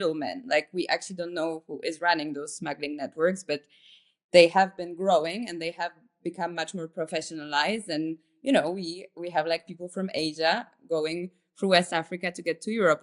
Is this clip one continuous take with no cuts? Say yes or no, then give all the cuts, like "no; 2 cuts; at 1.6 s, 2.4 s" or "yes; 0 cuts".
yes; 0 cuts